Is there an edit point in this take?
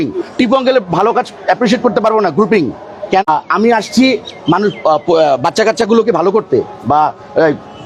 no; 0 cuts

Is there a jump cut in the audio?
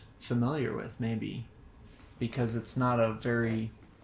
yes; 1 cut; at 1.5 s

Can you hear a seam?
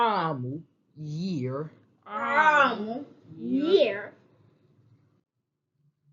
no; 0 cuts

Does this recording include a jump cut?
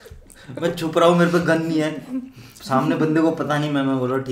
no; 0 cuts

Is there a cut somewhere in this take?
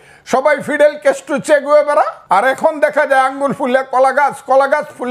yes; 1 cut; at 2.2 s

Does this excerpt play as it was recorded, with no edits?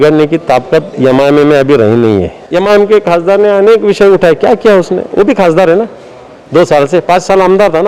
no; 1 cut; at 2.4 s

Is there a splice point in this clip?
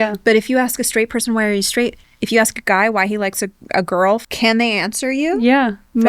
yes; 2 cuts; at 2.1 s, 4.2 s

